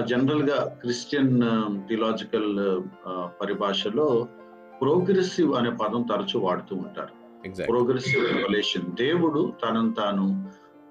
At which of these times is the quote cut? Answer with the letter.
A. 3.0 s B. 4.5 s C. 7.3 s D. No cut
D